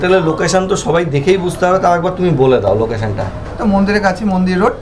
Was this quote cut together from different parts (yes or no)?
no